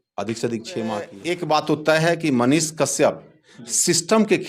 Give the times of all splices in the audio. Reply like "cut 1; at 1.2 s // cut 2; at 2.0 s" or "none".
cut 1; at 1.2 s